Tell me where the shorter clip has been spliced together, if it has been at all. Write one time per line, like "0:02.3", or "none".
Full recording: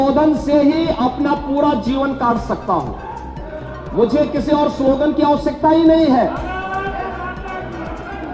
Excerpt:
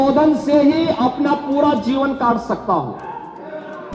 none